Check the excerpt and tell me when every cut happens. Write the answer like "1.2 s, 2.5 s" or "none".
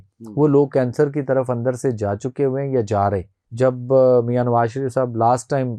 3.4 s